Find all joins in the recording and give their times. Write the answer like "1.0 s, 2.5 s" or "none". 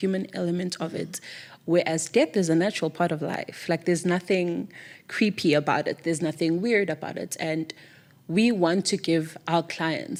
none

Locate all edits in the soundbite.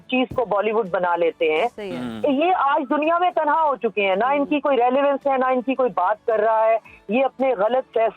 none

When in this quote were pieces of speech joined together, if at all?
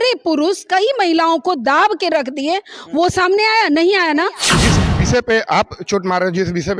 4.6 s

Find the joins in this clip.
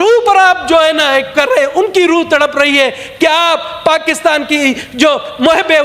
none

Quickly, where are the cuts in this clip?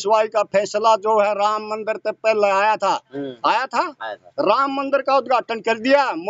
none

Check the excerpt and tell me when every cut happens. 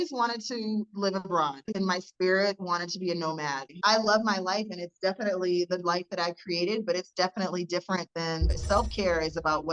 1.7 s, 3.7 s, 8.5 s

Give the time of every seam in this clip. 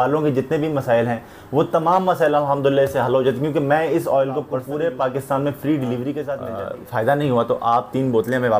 4.6 s, 6.4 s

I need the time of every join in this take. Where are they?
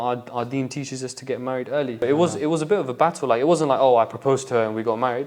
2.0 s

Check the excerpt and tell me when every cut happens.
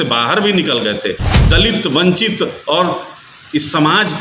1.3 s

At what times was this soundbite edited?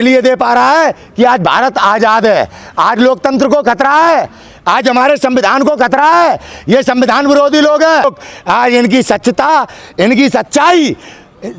8.0 s

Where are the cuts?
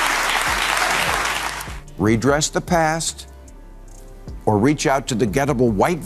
1.6 s

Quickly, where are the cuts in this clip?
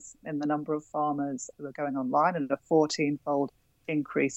1.5 s

